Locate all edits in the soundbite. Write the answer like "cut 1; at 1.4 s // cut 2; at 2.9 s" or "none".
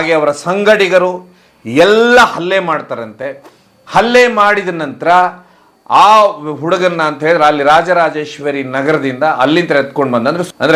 none

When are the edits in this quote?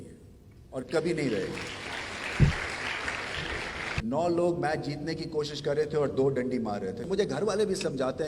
cut 1; at 3.9 s // cut 2; at 7.1 s

